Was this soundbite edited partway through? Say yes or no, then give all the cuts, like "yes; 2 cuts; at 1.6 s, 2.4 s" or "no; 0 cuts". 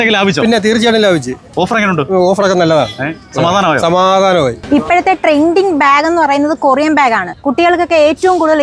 yes; 2 cuts; at 4.6 s, 7.3 s